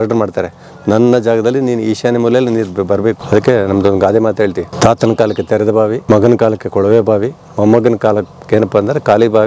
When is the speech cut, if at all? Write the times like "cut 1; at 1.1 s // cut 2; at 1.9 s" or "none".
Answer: cut 1; at 3.2 s // cut 2; at 4.7 s // cut 3; at 6.0 s